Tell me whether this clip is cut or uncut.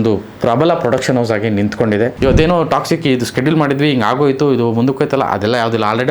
cut